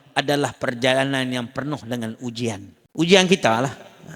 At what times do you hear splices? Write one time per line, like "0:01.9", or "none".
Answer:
0:02.7